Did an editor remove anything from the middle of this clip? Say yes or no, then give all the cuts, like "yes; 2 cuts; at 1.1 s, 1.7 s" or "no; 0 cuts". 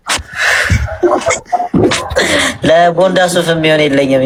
no; 0 cuts